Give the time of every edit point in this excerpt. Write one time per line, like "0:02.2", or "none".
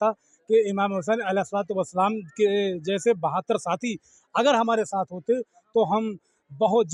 none

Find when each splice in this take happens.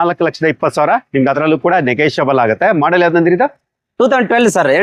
none

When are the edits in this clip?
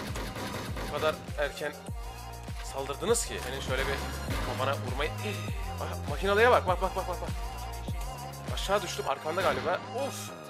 0:03.5

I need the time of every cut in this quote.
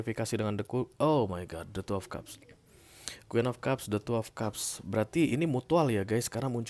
none

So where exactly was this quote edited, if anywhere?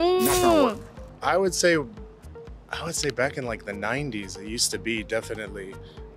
none

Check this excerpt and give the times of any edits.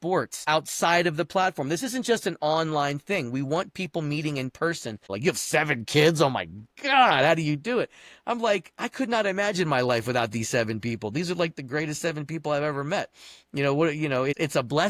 0:05.1

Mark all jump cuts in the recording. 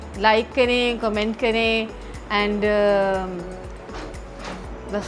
none

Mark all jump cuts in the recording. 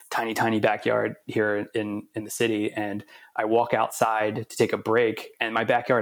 none

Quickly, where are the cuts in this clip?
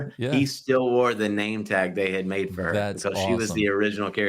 none

